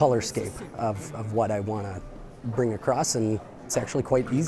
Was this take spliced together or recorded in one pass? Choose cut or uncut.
cut